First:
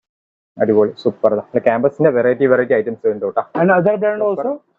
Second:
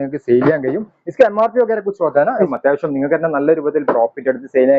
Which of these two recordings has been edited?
second; 1 cut; at 2.5 s

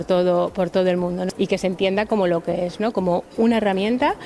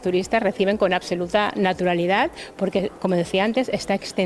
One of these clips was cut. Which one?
first; 1 cut; at 1.2 s

